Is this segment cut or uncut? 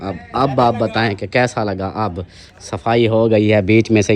uncut